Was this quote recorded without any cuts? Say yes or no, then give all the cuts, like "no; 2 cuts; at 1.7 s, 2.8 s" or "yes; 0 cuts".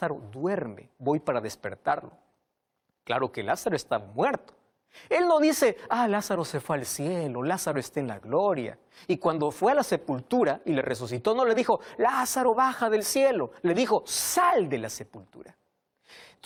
yes; 0 cuts